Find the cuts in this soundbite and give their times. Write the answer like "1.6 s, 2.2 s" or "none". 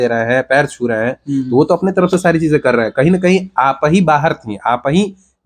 none